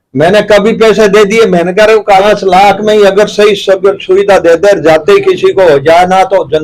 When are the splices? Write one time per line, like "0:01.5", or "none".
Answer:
0:02.2